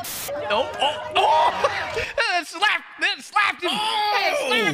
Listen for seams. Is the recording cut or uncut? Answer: uncut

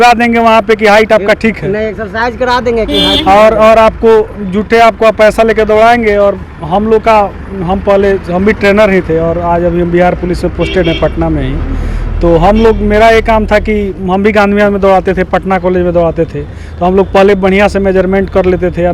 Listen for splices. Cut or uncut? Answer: uncut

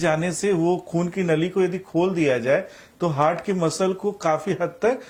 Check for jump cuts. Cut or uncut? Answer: uncut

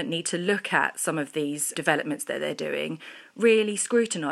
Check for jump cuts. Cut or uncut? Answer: cut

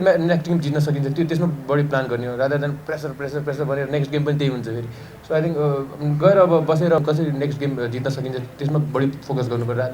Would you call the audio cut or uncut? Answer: cut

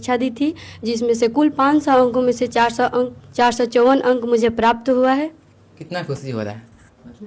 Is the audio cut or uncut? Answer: cut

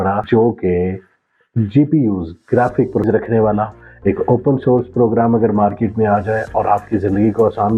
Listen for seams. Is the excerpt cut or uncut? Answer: cut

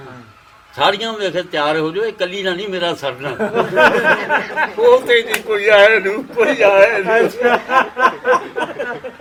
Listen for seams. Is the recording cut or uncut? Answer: uncut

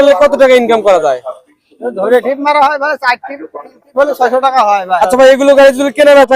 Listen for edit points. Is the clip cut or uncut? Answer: cut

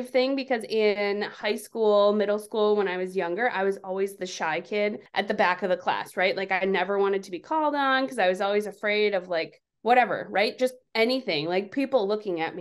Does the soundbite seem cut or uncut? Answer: uncut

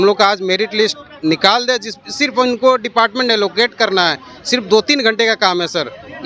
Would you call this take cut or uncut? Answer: uncut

